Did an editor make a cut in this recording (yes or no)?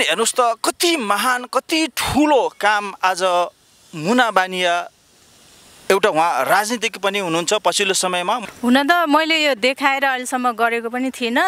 yes